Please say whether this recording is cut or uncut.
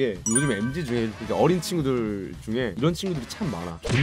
uncut